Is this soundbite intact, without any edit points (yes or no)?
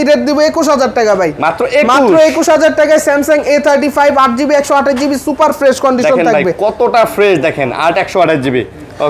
yes